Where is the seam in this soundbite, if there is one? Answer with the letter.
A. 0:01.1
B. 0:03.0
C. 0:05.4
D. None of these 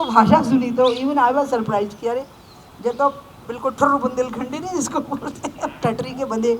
D